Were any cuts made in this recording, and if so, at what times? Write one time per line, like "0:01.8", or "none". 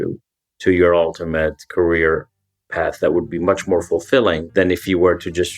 0:04.4

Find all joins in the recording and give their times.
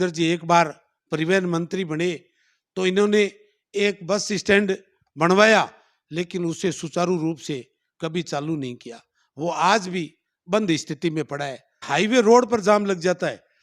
0:11.8

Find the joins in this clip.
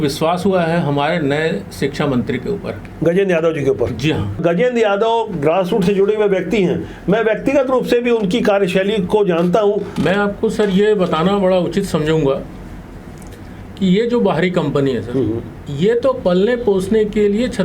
0:04.4
0:09.9

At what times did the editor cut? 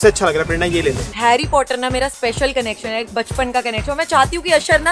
0:01.2

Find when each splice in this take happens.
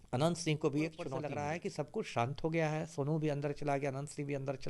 0:01.2

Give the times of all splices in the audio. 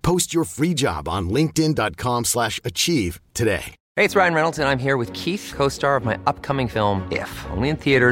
0:03.8

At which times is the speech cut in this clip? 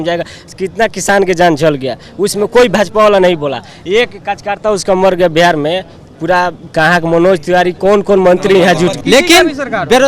0:09.0

